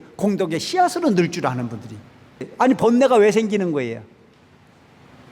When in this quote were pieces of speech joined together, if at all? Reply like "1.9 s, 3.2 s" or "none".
2.4 s